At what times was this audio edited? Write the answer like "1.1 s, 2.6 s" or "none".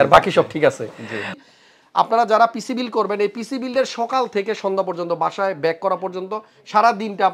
1.3 s